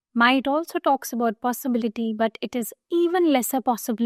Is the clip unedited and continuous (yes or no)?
yes